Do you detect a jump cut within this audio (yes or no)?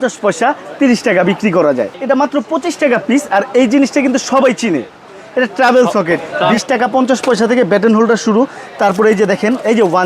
yes